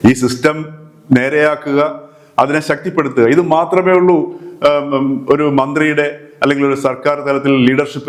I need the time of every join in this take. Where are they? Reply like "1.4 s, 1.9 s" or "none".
none